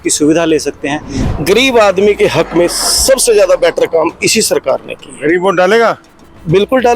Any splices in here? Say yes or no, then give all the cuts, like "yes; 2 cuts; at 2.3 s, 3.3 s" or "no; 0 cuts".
yes; 1 cut; at 1.2 s